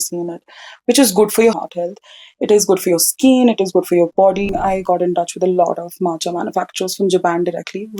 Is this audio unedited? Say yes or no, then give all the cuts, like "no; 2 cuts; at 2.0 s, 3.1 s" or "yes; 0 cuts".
no; 2 cuts; at 1.6 s, 4.5 s